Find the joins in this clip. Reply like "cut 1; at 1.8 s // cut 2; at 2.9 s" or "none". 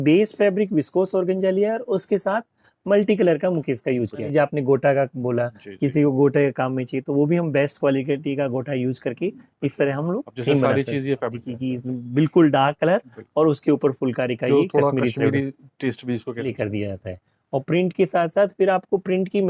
cut 1; at 4.3 s // cut 2; at 11.4 s // cut 3; at 16.5 s